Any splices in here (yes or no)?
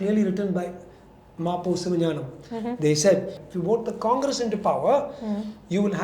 yes